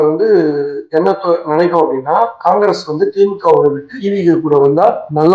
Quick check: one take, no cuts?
yes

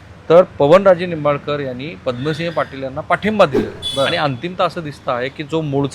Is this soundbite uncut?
no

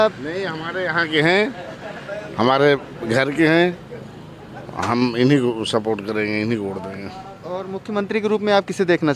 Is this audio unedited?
yes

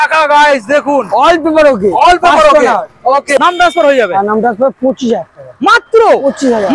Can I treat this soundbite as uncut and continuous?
no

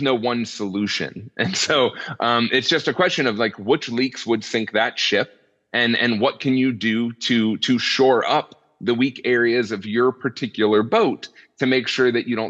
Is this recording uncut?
yes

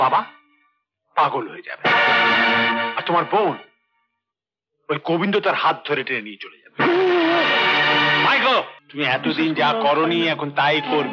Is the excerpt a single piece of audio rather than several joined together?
no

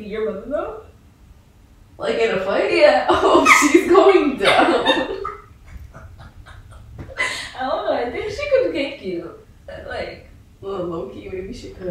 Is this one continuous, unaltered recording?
yes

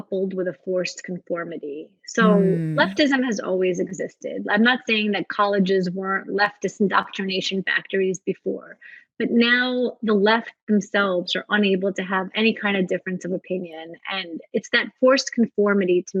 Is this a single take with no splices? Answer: yes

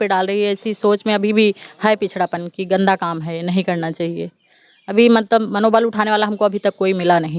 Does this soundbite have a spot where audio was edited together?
no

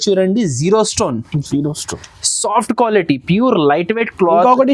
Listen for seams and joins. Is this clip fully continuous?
yes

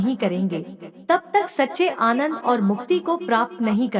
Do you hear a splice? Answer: no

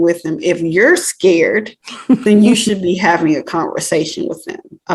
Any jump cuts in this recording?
no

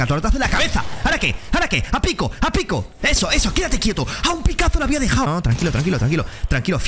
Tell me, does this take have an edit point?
yes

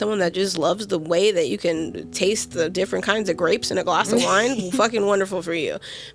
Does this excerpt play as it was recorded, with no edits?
yes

